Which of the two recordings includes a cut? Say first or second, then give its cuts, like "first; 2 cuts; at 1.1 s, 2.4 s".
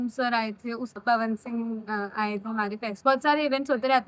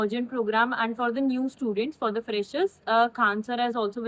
first; 2 cuts; at 1.0 s, 3.0 s